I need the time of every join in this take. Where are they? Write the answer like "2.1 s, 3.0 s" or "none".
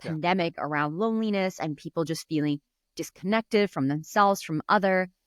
none